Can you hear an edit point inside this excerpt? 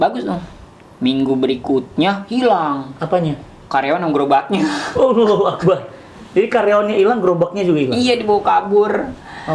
no; 0 cuts

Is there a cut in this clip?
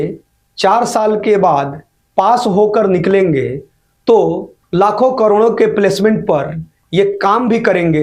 no; 0 cuts

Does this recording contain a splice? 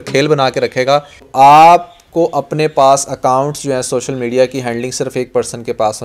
yes; 1 cut; at 1.2 s

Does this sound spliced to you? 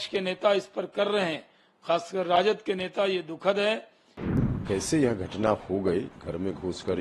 yes; 1 cut; at 4.4 s

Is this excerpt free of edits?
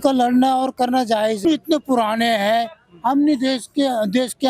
no; 1 cut; at 1.4 s

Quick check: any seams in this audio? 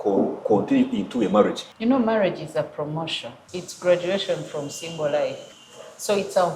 yes; 3 cuts; at 1.7 s, 3.3 s, 5.5 s

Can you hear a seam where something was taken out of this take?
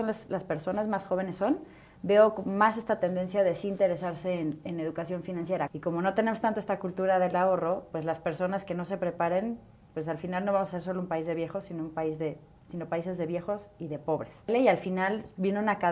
yes; 2 cuts; at 5.7 s, 14.5 s

